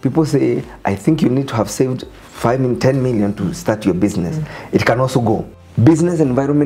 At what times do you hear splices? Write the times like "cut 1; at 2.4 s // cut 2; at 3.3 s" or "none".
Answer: cut 1; at 5.6 s